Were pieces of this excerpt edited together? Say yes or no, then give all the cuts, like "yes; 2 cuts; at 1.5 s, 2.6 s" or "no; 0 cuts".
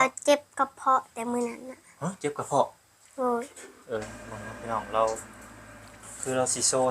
yes; 1 cut; at 4.0 s